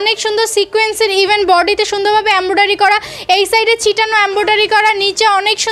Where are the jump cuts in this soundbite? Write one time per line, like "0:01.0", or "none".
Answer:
none